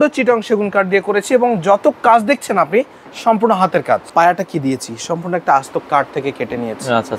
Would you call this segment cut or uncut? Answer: cut